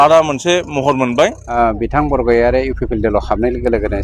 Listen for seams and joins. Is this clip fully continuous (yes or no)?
no